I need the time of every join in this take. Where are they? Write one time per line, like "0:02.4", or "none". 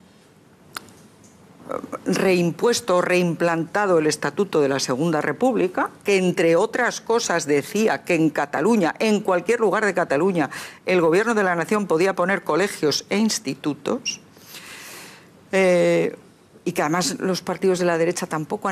0:02.5